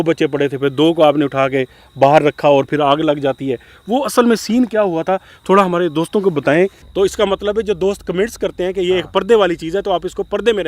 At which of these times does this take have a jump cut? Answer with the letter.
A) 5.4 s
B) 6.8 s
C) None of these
B